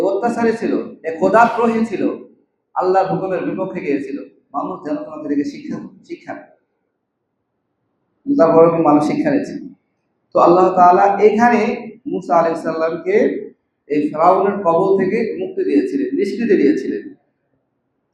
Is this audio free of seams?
yes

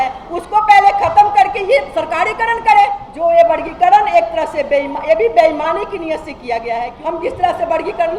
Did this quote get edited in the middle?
yes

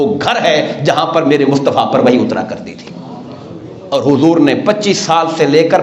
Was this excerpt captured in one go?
yes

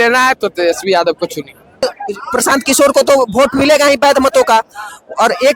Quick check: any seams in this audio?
yes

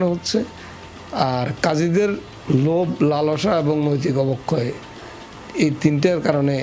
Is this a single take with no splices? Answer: yes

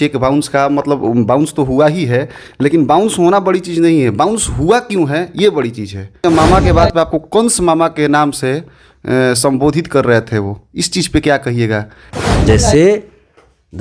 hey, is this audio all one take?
no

